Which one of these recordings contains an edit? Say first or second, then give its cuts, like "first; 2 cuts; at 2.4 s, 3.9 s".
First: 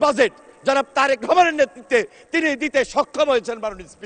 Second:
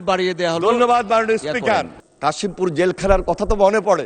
second; 1 cut; at 2.0 s